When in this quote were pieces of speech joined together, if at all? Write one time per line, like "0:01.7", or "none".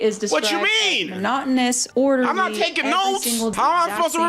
0:01.8
0:03.5